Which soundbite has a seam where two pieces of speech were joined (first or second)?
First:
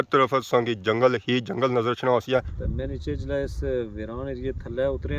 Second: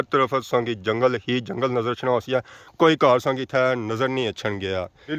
first